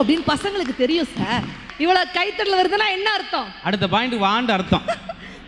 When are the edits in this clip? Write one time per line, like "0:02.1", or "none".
0:01.7